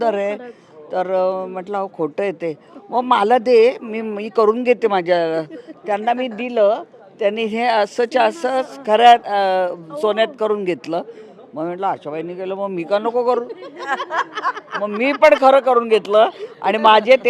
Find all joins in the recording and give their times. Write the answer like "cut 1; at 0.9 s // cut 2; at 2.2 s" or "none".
none